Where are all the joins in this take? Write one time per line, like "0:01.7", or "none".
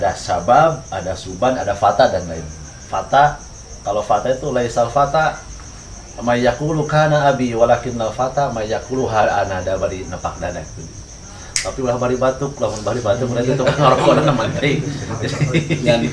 none

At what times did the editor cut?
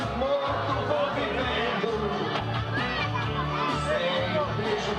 0:04.0

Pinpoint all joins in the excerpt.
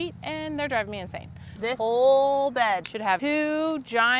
0:01.5
0:03.1

